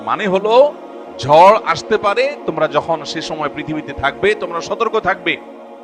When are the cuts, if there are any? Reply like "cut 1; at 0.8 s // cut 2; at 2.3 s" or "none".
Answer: none